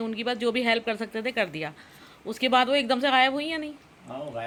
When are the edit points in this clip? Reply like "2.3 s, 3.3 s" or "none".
none